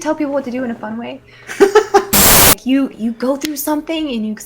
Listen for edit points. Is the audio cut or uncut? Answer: cut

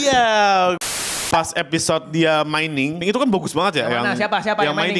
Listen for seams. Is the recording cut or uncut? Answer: cut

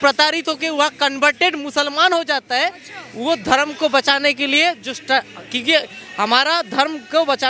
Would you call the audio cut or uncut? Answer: uncut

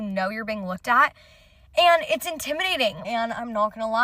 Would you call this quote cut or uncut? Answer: cut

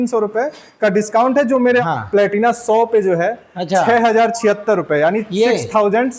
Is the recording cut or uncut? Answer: cut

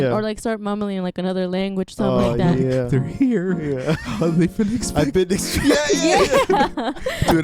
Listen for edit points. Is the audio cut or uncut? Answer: uncut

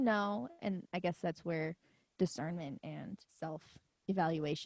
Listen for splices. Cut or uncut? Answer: cut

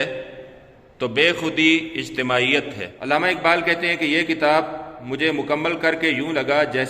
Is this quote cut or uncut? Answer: cut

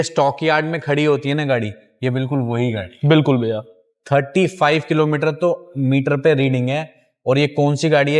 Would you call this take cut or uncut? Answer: uncut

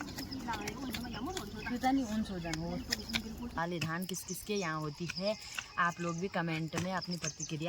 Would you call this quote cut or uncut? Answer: cut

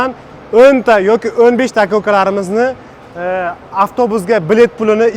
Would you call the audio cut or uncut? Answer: uncut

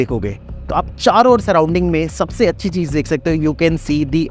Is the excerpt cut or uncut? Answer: uncut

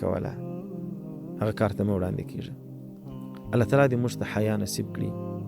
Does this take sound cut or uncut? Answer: uncut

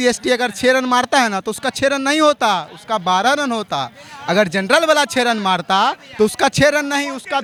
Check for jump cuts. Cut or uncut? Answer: uncut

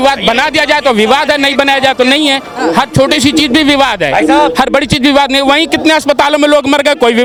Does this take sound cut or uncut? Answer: uncut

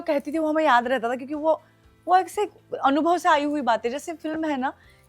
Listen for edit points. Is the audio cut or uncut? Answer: uncut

